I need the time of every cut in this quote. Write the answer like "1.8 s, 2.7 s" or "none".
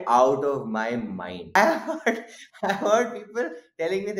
1.6 s